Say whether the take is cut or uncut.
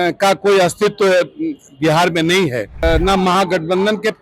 cut